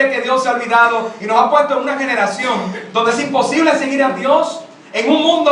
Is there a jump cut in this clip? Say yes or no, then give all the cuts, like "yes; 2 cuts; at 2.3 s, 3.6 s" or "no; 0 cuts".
no; 0 cuts